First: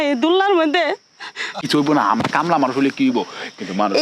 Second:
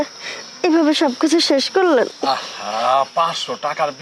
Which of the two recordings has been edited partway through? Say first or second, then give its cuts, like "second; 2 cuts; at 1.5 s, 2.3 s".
first; 1 cut; at 1.5 s